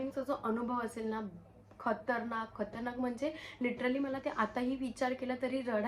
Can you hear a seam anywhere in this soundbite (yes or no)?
no